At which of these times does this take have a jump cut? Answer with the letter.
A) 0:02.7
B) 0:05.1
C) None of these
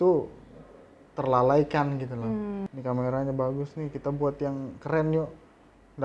A